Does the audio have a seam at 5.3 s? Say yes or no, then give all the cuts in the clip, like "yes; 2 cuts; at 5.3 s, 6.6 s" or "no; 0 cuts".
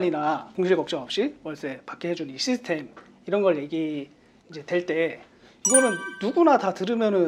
no; 0 cuts